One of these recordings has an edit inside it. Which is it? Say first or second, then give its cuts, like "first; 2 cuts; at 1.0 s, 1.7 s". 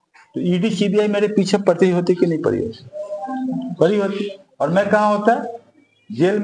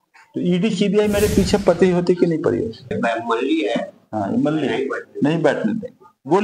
second; 1 cut; at 2.9 s